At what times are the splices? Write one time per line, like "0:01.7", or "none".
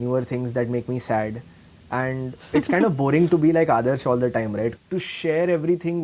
0:04.8